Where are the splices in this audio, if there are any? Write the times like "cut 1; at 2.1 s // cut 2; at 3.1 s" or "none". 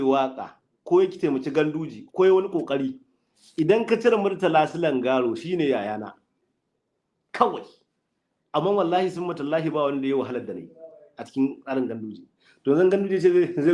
none